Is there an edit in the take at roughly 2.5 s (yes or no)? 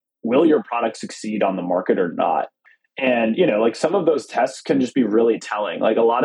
yes